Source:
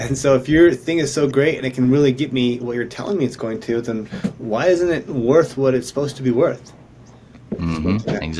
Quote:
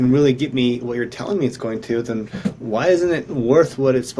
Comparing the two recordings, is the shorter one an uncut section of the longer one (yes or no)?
yes